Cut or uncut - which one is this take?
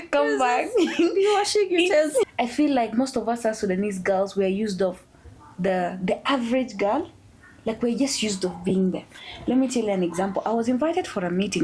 cut